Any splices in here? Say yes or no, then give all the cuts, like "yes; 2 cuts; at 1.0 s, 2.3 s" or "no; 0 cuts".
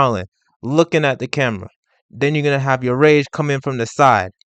no; 0 cuts